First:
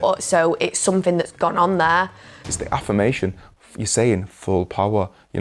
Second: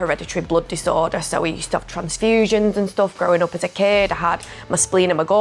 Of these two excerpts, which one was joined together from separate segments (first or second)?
first